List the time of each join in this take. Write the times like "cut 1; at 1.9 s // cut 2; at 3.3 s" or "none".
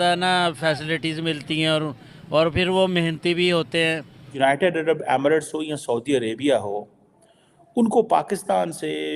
cut 1; at 4.2 s